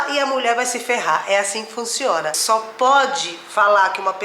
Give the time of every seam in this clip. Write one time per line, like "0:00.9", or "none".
0:02.4

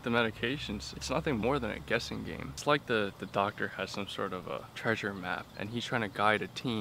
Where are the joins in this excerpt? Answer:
0:00.9
0:02.5
0:04.7
0:05.5

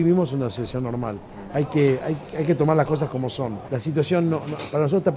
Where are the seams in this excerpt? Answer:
0:03.6

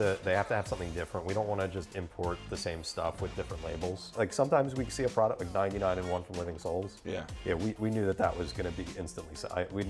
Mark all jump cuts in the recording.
0:04.1

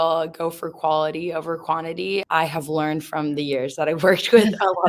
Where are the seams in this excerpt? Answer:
0:02.2

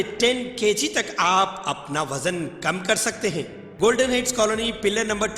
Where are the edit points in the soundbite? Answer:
0:03.6

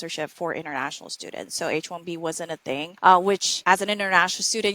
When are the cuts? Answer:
0:02.9
0:03.5

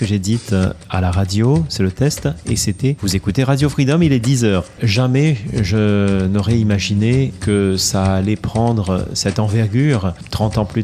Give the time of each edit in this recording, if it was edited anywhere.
0:03.0
0:04.8
0:07.4

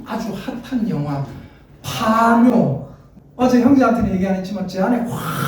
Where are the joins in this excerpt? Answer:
0:03.2

